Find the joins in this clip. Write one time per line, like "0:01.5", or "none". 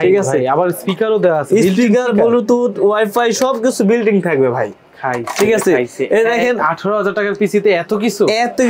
none